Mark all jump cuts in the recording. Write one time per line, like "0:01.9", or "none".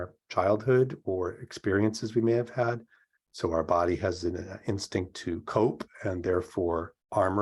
none